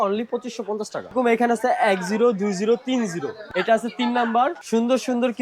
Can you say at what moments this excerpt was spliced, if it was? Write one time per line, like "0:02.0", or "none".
0:01.1
0:03.4
0:04.6